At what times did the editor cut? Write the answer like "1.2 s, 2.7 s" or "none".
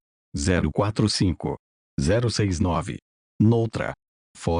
0.9 s